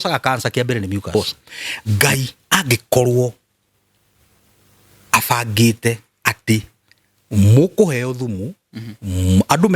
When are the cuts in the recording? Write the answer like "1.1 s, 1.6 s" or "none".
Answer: 1.1 s